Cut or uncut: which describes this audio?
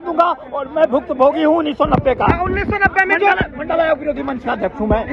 uncut